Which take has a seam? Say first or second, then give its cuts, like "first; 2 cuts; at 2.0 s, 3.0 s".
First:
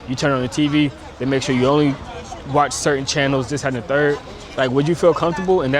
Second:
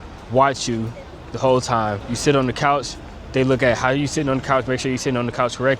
second; 1 cut; at 2.1 s